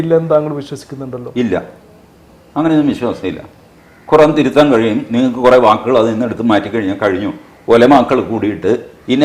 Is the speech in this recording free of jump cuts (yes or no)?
yes